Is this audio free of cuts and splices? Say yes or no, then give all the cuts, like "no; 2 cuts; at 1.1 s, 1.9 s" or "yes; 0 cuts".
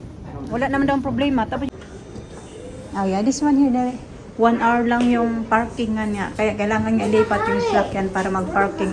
no; 1 cut; at 1.7 s